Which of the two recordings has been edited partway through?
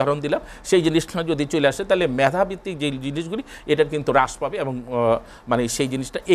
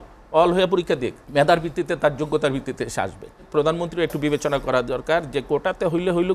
second; 2 cuts; at 1.2 s, 3.4 s

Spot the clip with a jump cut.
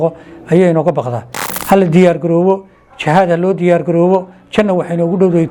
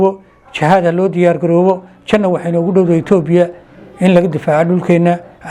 first; 1 cut; at 1.5 s

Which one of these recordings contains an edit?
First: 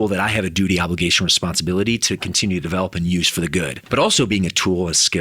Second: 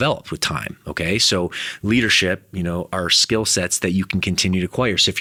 first; 1 cut; at 3.8 s

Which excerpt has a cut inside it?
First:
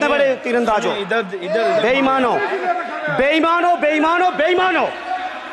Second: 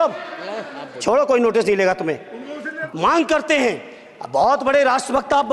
second; 1 cut; at 2.8 s

